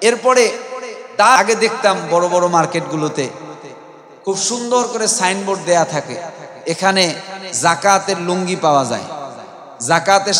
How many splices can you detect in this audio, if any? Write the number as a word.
one